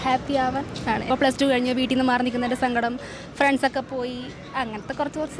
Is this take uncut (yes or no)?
no